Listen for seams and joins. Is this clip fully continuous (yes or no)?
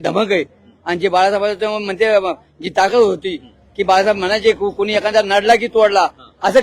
yes